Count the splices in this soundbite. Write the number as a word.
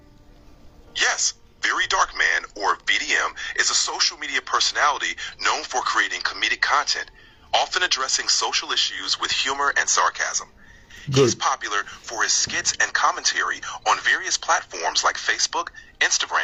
zero